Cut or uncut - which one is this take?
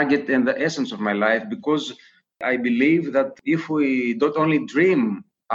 cut